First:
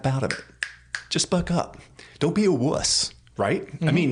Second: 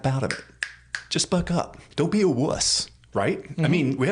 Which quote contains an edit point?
second; 1 cut; at 1.8 s

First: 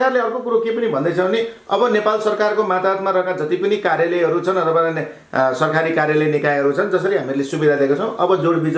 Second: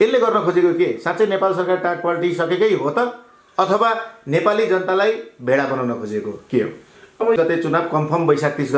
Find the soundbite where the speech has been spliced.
second; 1 cut; at 7.4 s

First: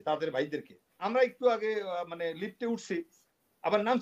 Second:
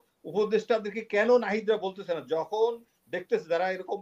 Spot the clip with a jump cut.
first; 1 cut; at 1.0 s

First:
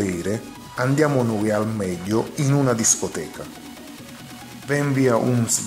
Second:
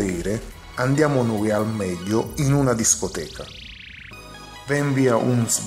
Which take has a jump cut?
first; 2 cuts; at 3.4 s, 4.7 s

